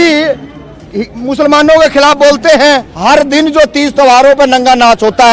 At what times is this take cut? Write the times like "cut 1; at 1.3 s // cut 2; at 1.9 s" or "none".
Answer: cut 1; at 2.9 s